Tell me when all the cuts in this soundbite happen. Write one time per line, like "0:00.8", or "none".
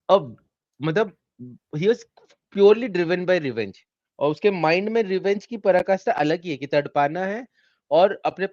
none